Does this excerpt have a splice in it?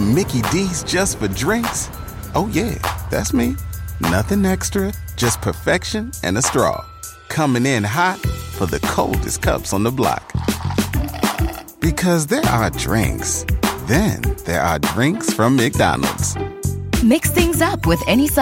no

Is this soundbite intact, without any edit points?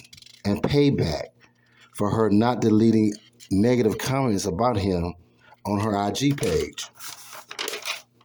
yes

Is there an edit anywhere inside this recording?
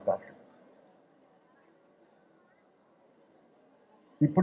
no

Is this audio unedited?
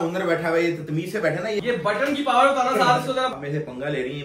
no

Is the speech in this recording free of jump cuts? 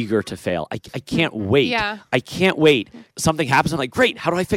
no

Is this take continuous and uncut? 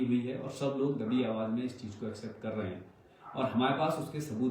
yes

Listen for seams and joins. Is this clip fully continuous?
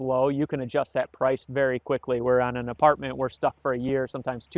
yes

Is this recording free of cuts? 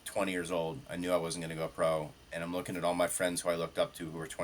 yes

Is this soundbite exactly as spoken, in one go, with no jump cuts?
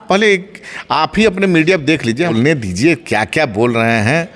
no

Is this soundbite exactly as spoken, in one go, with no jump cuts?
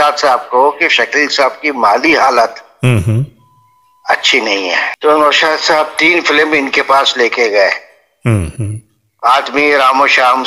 no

